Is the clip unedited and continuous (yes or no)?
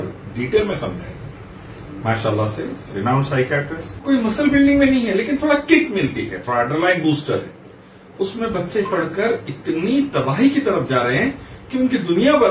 no